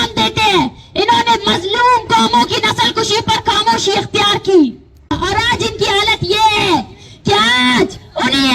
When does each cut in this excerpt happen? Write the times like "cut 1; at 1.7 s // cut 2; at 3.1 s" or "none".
cut 1; at 5.1 s